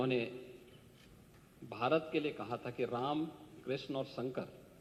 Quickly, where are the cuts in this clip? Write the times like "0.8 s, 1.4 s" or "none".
none